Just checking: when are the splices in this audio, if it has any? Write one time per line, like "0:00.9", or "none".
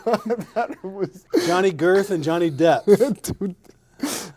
0:01.2

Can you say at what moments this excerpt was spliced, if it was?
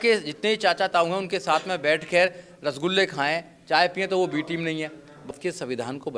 0:05.3

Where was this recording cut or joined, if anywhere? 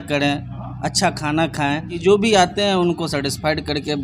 0:01.9

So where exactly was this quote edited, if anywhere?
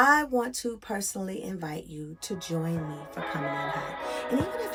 none

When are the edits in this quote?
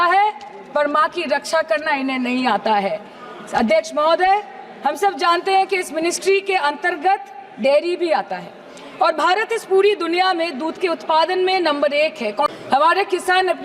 0:12.5

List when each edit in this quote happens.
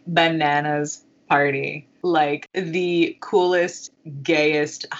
0:01.8
0:02.5

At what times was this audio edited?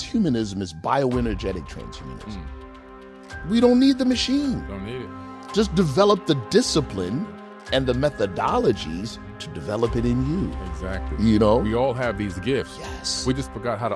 none

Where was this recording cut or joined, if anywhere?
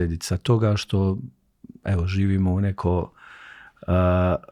none

